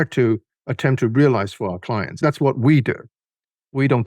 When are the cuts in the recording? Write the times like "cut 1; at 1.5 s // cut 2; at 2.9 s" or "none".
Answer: cut 1; at 2.2 s